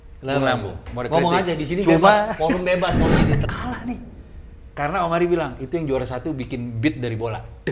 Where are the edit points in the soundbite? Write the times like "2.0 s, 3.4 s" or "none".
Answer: 3.4 s